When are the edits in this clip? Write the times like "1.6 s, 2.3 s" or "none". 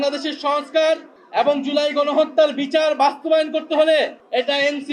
none